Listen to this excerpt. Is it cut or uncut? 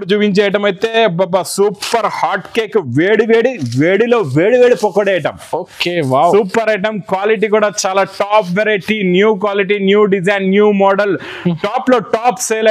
uncut